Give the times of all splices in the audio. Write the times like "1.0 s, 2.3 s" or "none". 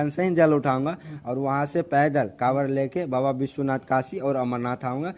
none